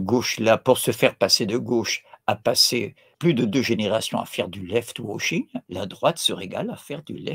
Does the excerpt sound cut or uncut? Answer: cut